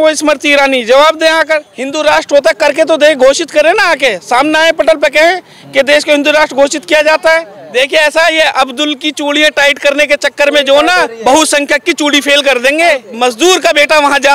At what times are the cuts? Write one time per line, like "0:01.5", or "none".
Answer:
0:01.8
0:07.6
0:13.1